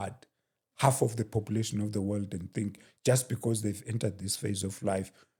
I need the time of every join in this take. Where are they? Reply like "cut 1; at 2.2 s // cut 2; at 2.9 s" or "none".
none